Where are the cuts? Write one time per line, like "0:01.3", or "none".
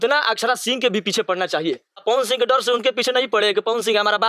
0:02.0

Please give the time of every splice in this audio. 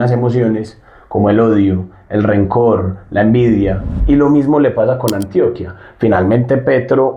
0:03.9

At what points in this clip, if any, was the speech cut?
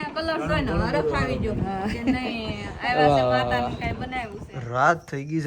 0:04.5

